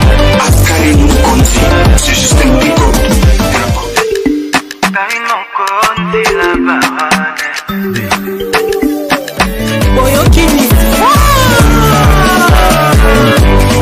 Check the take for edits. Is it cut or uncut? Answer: uncut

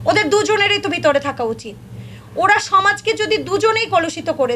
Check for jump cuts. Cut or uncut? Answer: uncut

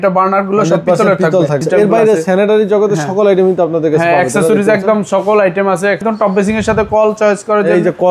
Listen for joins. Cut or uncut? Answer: cut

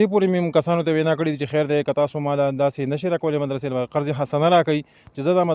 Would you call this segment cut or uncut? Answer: uncut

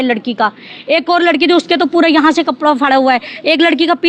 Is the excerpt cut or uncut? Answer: uncut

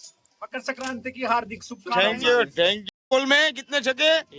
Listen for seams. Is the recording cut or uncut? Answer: cut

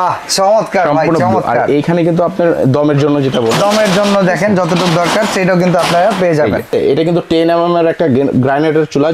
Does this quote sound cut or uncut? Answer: cut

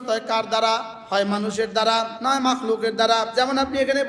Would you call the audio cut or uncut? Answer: cut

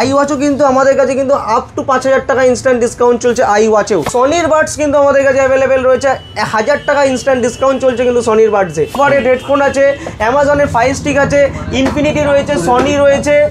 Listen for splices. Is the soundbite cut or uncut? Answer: cut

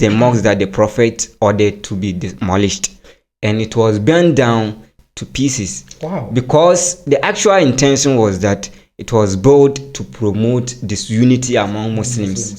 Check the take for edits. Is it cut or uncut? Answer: uncut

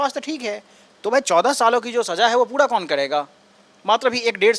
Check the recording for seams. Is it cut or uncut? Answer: uncut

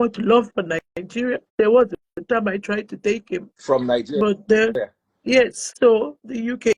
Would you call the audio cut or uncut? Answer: cut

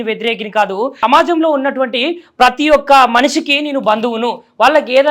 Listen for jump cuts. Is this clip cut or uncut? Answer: cut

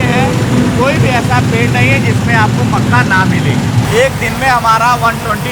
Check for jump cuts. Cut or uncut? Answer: cut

